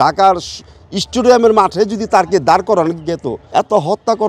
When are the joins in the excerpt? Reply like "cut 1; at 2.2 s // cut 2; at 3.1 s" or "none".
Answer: cut 1; at 3.4 s